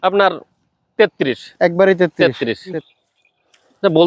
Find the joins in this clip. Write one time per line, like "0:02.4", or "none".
0:02.8